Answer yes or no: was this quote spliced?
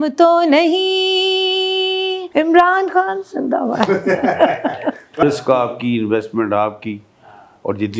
yes